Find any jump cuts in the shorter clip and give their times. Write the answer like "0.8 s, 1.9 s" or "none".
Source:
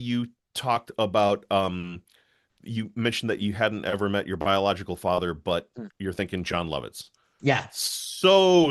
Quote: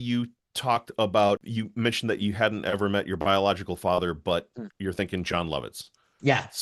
1.4 s